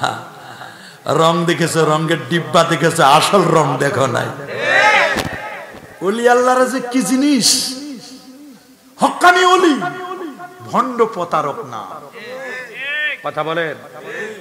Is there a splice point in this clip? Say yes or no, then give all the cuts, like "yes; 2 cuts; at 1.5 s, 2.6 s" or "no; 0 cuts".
no; 0 cuts